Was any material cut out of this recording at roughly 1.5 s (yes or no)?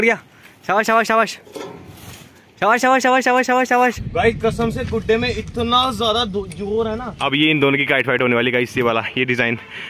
no